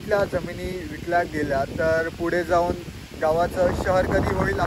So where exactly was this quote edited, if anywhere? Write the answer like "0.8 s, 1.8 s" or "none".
none